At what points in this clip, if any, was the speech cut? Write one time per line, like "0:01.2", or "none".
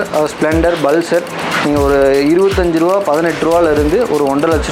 none